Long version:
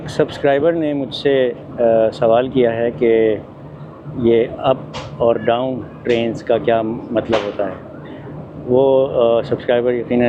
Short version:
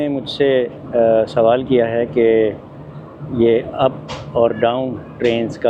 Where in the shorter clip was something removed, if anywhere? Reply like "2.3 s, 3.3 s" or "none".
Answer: none